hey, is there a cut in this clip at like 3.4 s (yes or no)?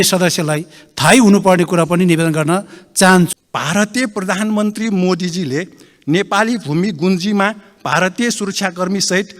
yes